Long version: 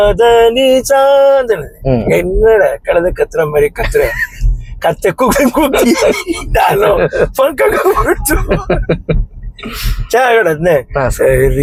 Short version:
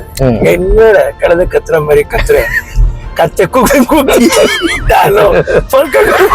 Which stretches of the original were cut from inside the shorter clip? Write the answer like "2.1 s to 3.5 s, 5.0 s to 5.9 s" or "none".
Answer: none